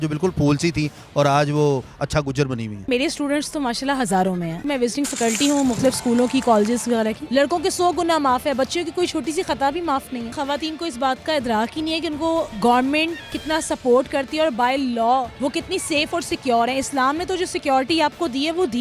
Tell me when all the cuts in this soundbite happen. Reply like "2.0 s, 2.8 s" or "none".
2.9 s, 4.6 s, 7.2 s, 10.3 s, 12.5 s, 15.3 s